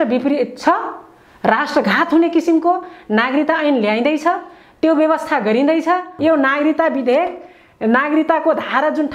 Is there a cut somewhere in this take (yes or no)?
yes